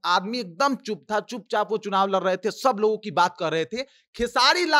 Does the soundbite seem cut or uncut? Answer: uncut